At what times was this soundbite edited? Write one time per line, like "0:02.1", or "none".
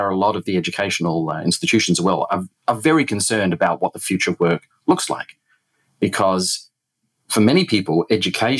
none